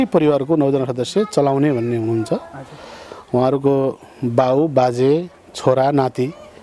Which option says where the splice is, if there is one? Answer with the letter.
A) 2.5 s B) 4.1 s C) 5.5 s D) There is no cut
D